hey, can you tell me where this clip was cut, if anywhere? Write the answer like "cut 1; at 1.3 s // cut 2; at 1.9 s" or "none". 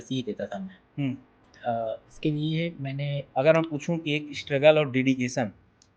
cut 1; at 3.2 s